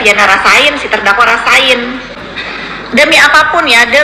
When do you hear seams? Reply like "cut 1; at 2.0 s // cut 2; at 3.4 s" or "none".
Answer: cut 1; at 2.2 s